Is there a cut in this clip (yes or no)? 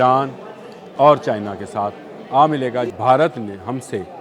yes